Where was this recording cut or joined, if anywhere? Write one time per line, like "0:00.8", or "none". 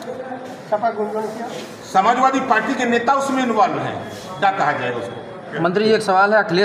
0:05.5